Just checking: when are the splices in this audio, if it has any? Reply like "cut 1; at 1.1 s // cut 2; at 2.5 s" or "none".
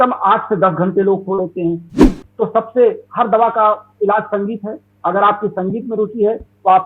cut 1; at 2.0 s